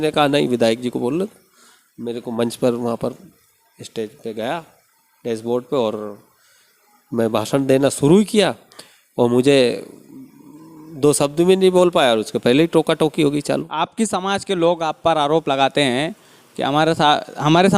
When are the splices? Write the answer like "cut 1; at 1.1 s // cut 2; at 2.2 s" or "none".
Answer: cut 1; at 13.7 s